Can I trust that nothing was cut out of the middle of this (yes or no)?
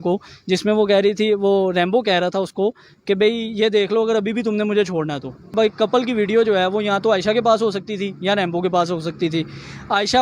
no